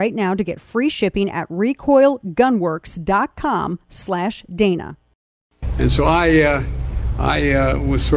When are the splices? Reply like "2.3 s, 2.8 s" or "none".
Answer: 5.7 s